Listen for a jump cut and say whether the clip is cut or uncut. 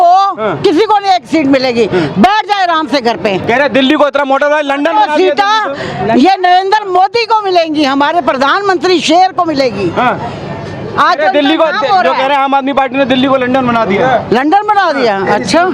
uncut